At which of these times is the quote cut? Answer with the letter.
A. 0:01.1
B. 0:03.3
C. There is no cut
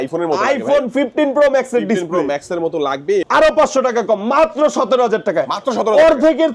B